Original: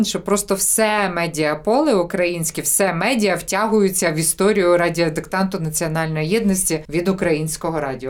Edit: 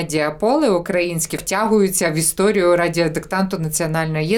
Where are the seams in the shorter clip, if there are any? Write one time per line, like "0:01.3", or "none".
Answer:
0:01.4

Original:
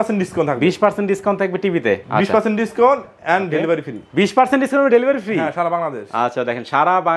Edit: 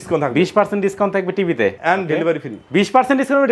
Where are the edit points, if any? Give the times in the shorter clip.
0:01.8

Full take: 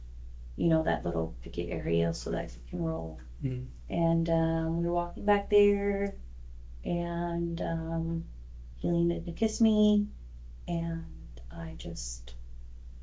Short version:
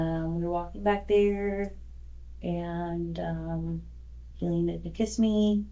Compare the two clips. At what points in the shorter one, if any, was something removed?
none

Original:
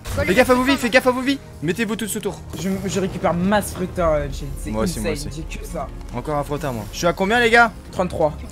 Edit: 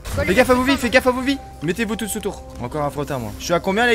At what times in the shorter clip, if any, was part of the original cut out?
0:02.5

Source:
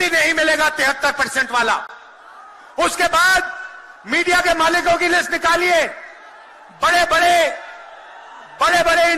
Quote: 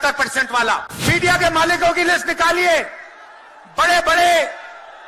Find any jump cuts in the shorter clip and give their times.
0:00.9

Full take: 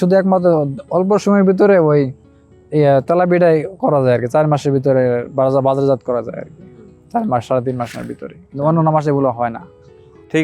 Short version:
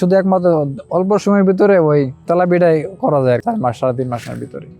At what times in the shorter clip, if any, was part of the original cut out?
0:02.2
0:03.4

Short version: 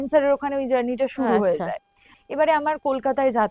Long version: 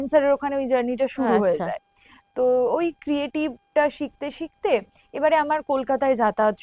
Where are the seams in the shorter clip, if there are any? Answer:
0:02.2

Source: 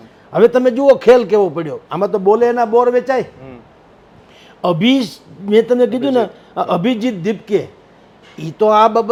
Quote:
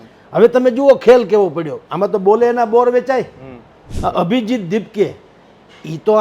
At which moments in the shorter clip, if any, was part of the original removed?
0:03.9

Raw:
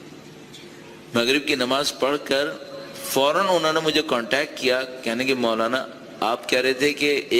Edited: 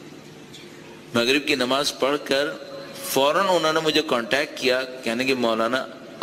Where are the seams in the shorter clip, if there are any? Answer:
none

